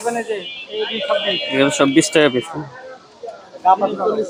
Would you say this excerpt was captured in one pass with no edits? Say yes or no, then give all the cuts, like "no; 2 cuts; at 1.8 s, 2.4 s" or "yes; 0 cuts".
yes; 0 cuts